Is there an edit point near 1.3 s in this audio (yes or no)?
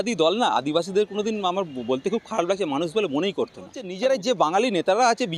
no